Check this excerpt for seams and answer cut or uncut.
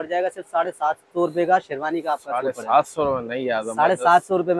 uncut